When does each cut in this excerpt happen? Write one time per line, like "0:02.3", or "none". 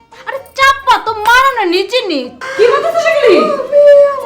0:02.3